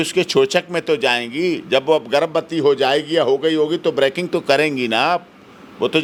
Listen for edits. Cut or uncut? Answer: uncut